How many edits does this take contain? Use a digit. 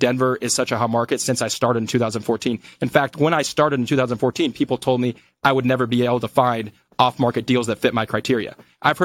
0